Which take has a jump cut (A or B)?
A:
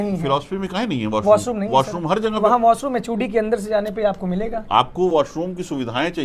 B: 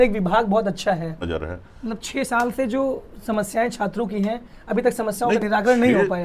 B